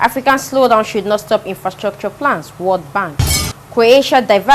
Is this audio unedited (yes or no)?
yes